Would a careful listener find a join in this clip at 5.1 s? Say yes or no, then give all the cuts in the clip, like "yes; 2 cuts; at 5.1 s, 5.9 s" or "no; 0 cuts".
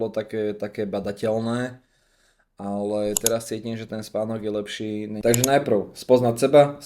yes; 1 cut; at 5.1 s